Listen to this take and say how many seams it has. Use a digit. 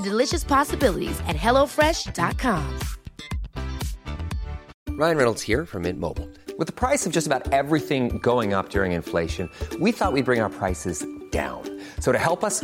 1